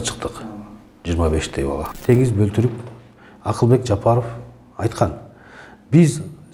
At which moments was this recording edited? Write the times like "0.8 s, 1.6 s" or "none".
1.9 s